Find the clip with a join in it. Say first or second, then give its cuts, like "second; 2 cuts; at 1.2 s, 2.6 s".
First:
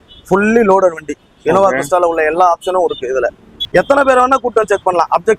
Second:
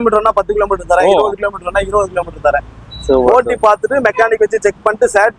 first; 1 cut; at 3.6 s